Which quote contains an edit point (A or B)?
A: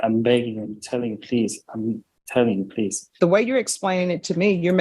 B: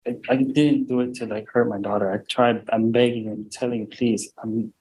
A